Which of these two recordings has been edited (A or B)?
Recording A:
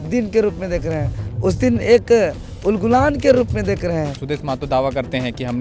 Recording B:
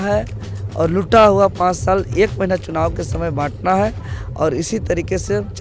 A